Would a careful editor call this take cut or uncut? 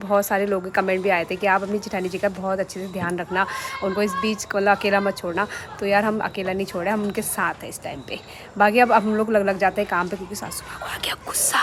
uncut